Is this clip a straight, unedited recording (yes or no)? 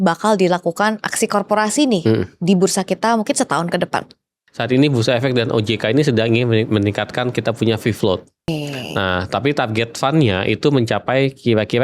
no